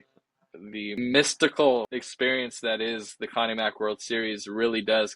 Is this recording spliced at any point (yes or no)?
yes